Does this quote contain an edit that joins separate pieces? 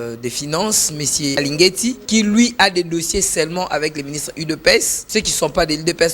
yes; 3 cuts; at 1.4 s, 2.0 s, 5.0 s

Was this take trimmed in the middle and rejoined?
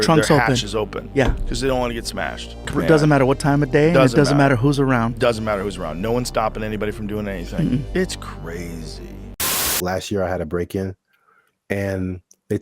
yes; 1 cut; at 9.8 s

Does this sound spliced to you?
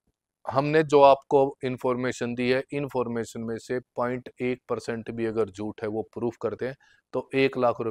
no; 0 cuts

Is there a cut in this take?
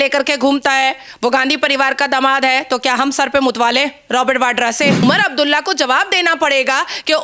yes; 1 cut; at 5.0 s

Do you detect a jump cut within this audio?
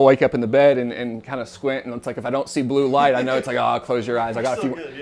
no; 0 cuts

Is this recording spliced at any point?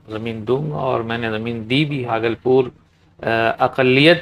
yes; 1 cut; at 2.0 s

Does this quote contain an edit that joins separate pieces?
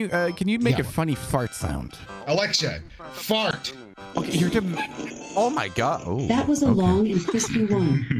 yes; 1 cut; at 2.1 s

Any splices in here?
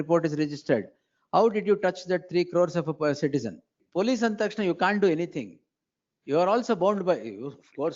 yes; 1 cut; at 3.8 s

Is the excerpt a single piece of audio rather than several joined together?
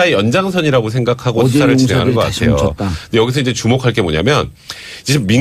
no; 1 cut; at 3.2 s

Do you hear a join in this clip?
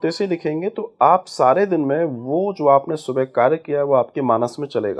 no; 0 cuts

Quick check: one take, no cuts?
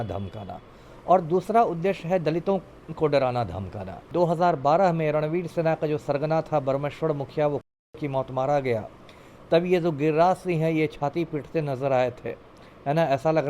no; 1 cut; at 4.1 s

